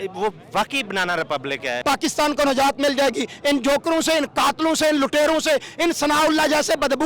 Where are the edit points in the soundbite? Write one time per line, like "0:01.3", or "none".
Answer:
0:01.8